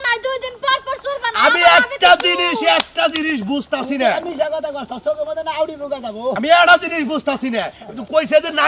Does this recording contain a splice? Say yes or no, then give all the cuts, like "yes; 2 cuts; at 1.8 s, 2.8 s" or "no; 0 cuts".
no; 0 cuts